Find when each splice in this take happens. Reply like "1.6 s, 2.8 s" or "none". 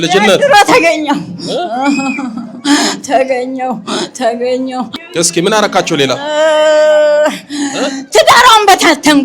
5.0 s